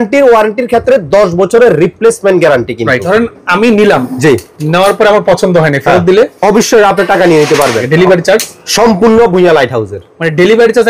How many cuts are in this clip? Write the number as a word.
two